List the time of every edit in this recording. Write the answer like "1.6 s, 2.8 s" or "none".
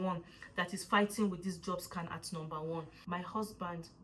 3.0 s